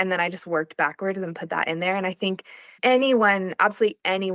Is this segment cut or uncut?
uncut